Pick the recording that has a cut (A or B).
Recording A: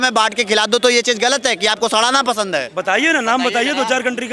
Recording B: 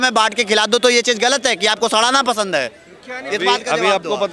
A